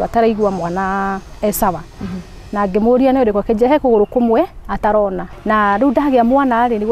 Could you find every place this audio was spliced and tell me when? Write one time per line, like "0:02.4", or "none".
0:05.3